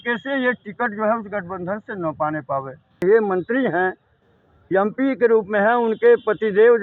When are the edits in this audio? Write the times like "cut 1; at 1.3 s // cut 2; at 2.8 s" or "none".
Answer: cut 1; at 3.0 s